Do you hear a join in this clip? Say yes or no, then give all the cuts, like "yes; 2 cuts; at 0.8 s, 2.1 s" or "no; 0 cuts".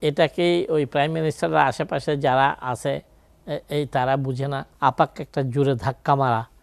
yes; 1 cut; at 4.7 s